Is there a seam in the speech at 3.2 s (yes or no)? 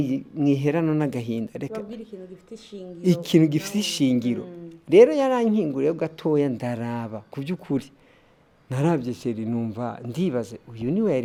no